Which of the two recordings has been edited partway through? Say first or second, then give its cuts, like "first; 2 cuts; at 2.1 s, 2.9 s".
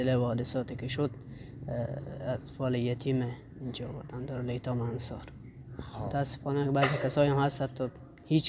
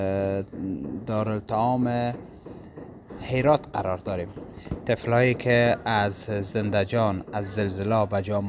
first; 1 cut; at 6.0 s